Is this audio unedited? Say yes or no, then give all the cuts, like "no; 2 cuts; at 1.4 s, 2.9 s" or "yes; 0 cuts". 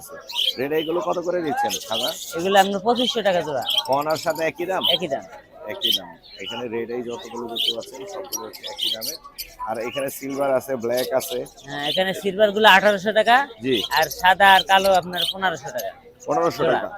yes; 0 cuts